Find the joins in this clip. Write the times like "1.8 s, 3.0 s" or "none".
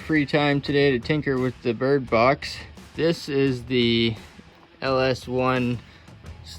2.9 s